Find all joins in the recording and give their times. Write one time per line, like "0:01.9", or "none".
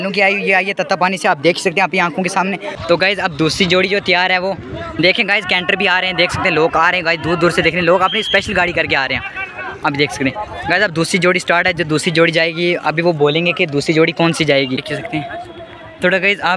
0:02.7
0:14.9